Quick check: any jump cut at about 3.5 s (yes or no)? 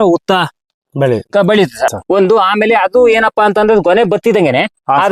no